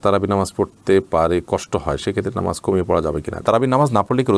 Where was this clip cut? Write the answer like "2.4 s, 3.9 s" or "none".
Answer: 3.4 s